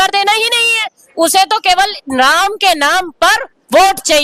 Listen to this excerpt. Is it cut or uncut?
uncut